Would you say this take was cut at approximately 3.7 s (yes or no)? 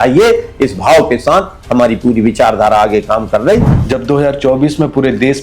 yes